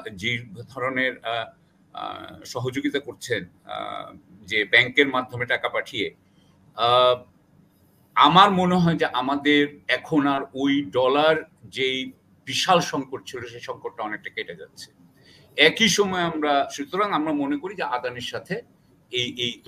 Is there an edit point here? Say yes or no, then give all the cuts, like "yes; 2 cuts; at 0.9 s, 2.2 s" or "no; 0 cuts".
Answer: no; 0 cuts